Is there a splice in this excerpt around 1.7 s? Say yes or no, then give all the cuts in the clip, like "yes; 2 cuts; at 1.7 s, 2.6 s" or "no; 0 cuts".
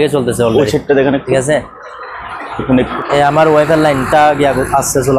no; 1 cut; at 2.9 s